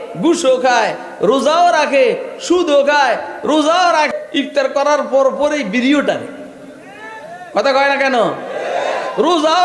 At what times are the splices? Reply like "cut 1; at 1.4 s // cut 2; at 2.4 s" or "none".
cut 1; at 4.1 s